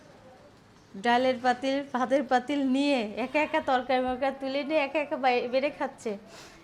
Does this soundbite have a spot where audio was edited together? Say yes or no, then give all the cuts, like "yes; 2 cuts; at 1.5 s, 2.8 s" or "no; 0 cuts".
no; 0 cuts